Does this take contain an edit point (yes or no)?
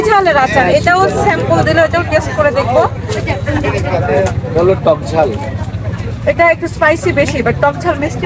no